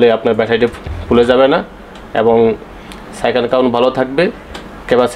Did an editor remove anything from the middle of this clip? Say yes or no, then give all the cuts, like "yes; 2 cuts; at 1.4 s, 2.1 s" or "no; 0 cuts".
no; 0 cuts